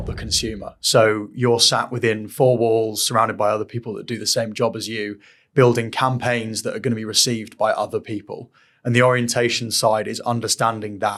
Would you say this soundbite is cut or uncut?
uncut